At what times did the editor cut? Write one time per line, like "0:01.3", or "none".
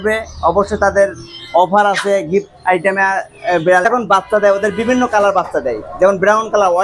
0:03.9